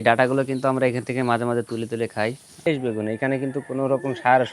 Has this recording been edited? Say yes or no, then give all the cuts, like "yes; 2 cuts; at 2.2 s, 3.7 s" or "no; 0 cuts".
yes; 1 cut; at 2.7 s